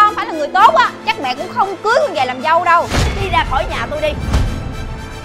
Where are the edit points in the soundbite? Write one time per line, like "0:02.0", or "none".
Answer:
0:03.0

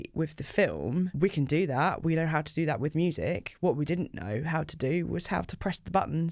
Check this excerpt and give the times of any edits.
0:01.1

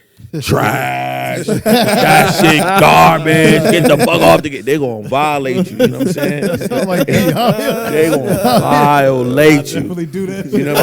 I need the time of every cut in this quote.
none

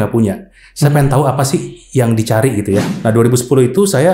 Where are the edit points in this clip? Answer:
0:02.9

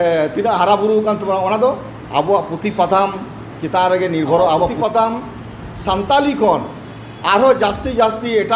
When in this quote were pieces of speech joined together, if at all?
0:04.7

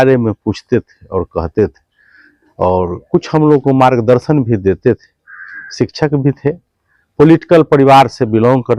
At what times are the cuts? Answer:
none

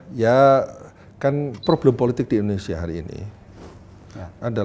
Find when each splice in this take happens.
0:01.6

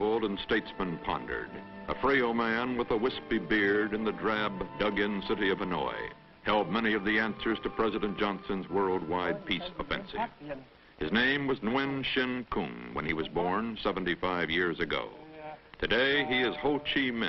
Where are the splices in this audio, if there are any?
none

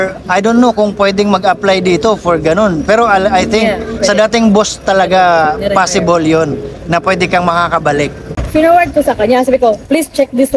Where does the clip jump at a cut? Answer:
0:08.3

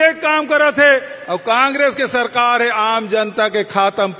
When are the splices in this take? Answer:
none

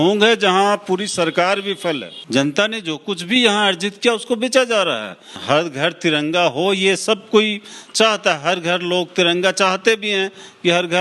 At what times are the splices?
0:02.1
0:05.4

